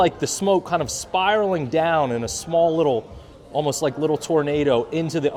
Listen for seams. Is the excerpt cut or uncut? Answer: uncut